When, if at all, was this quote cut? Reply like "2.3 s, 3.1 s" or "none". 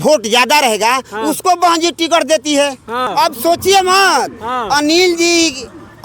3.1 s

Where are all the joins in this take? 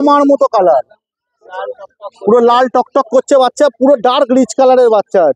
none

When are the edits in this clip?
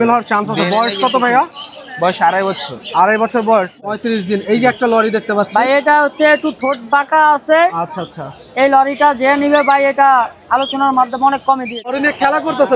3.8 s, 12.0 s

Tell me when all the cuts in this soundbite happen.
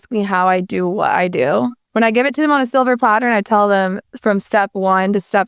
1.8 s

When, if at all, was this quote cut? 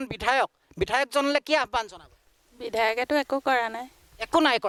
none

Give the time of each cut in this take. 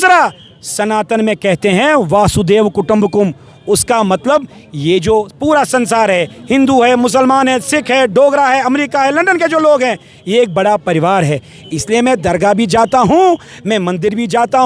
none

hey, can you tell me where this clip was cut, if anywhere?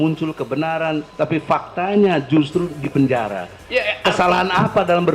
1.1 s

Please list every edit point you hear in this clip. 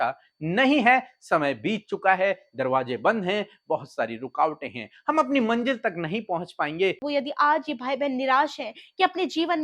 7.0 s

